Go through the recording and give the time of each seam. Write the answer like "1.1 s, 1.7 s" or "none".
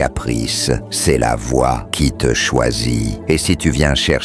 0.9 s, 1.9 s, 3.1 s